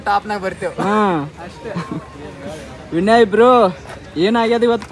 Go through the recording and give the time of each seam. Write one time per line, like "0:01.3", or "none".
none